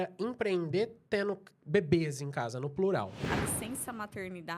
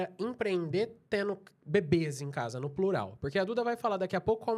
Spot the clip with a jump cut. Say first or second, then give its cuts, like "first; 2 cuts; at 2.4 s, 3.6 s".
first; 1 cut; at 3.2 s